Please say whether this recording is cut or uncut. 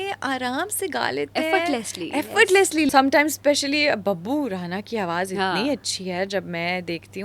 cut